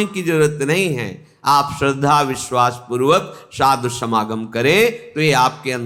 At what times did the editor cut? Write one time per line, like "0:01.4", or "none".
none